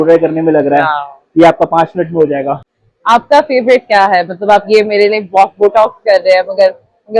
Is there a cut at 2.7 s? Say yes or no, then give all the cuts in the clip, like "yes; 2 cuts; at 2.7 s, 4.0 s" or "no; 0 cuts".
yes; 1 cut; at 2.7 s